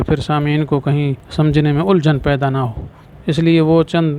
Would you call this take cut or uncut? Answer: cut